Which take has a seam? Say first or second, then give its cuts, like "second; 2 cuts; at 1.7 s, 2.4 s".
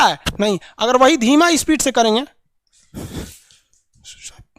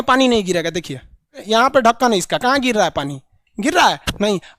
second; 1 cut; at 1.4 s